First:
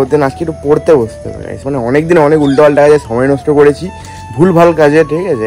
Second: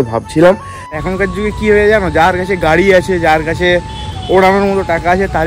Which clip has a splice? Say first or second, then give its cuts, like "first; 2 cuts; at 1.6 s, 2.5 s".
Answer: second; 1 cut; at 1.0 s